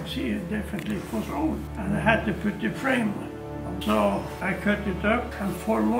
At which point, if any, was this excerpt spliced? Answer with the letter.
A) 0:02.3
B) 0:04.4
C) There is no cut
B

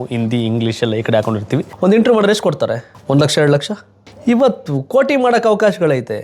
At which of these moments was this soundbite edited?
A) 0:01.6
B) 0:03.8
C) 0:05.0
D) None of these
A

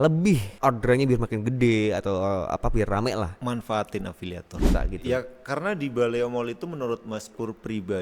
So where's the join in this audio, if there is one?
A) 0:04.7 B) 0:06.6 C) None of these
A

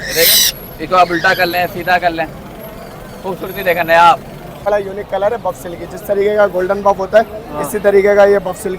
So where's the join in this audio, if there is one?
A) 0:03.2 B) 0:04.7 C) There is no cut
B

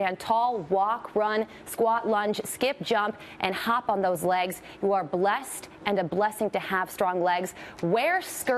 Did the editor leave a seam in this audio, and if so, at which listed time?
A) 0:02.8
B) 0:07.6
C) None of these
A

